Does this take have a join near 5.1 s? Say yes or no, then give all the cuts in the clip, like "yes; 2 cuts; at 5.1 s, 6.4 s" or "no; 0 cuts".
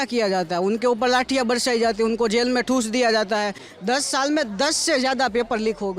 no; 1 cut; at 3.7 s